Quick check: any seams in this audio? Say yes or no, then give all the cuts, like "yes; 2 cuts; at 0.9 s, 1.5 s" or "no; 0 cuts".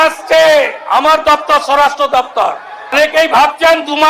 yes; 1 cut; at 2.9 s